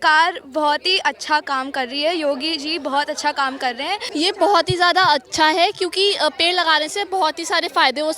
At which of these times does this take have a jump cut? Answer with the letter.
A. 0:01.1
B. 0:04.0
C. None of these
B